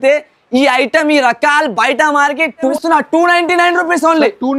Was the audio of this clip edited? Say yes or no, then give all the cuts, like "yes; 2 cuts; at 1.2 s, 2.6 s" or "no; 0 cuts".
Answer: yes; 1 cut; at 2.7 s